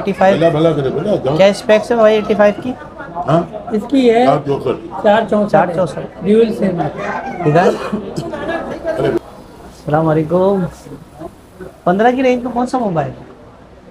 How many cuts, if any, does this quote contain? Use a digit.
1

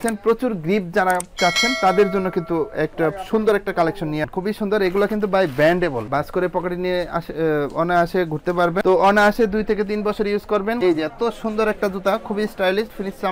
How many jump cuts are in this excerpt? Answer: 1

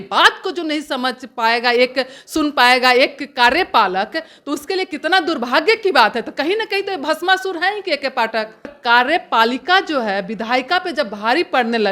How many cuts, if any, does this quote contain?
1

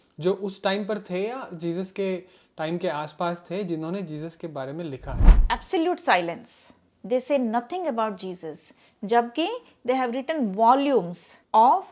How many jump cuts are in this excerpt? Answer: 1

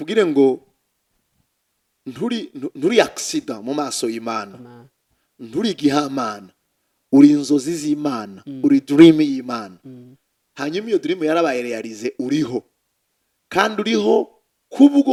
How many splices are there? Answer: 0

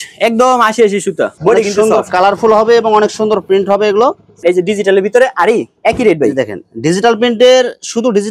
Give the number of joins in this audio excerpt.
2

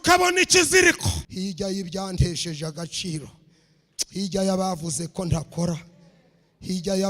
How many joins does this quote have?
1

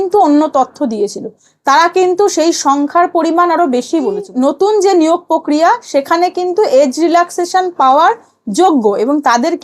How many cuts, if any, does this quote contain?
1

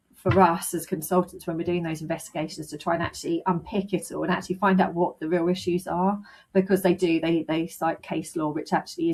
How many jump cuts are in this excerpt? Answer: 0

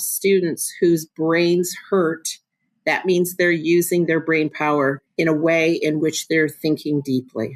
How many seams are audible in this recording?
1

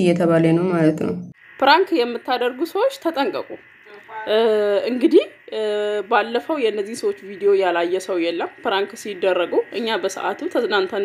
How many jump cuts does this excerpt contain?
1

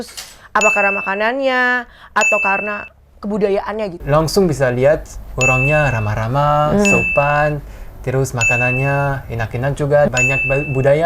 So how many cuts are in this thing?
2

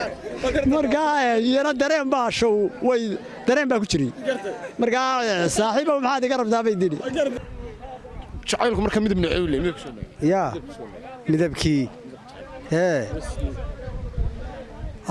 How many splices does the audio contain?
1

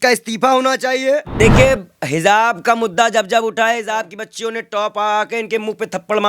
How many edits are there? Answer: 1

